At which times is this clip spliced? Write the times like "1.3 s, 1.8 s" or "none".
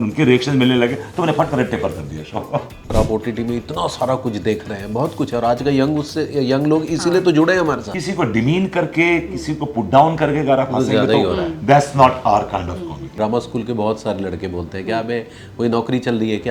2.9 s, 7.9 s, 13.0 s